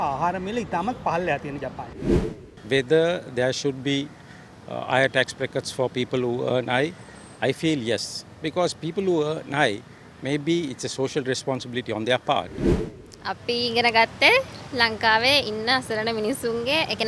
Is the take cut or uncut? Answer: cut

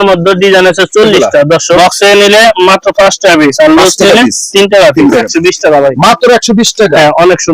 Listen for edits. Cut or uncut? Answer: cut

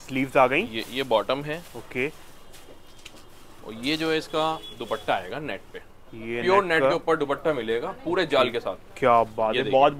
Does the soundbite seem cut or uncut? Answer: uncut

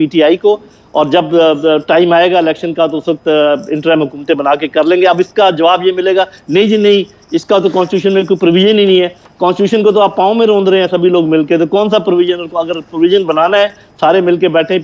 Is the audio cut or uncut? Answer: uncut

